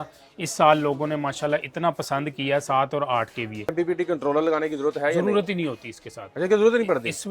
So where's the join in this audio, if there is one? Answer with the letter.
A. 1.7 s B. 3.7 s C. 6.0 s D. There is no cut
B